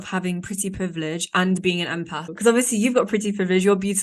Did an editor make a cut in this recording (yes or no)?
yes